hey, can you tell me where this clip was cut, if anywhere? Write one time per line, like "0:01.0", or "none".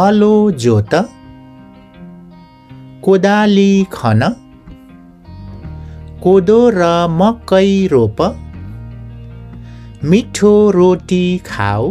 0:01.1
0:02.5
0:04.4
0:05.8